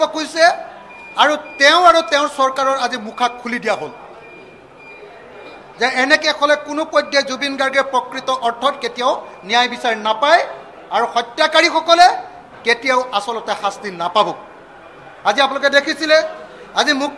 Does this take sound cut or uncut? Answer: uncut